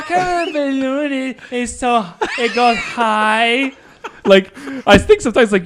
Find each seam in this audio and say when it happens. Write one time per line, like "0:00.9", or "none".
none

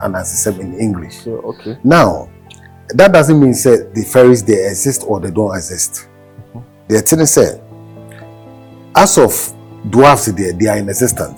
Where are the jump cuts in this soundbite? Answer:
none

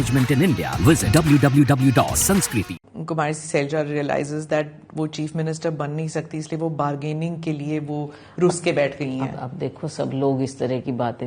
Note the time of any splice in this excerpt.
0:02.8

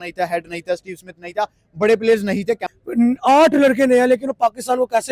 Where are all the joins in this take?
0:02.8

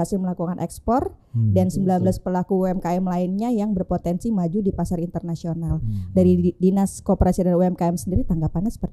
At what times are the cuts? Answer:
none

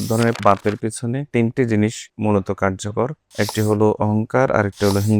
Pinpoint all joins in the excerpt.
0:01.2
0:02.1
0:03.2

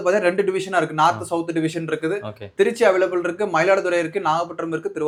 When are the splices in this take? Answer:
none

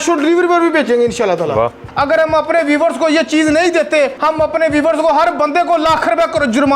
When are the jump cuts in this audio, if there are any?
0:01.8
0:04.2

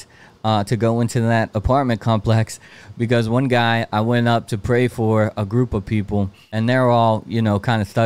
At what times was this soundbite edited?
0:06.4

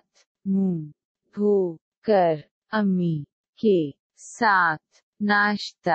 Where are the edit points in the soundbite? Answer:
none

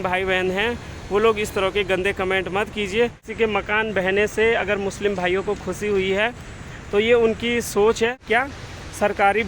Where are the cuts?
0:03.2
0:08.2

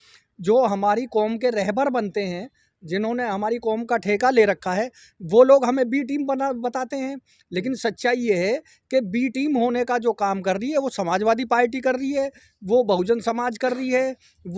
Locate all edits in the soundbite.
none

